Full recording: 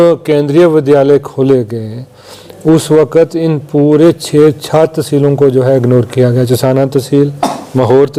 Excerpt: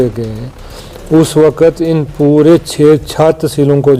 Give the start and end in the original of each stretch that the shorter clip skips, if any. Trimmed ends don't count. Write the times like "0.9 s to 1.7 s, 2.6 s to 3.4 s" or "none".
none